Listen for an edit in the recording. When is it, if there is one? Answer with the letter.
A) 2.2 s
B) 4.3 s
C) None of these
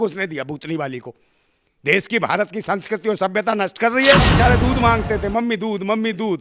B